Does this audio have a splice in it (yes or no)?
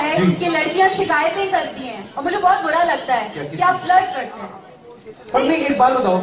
no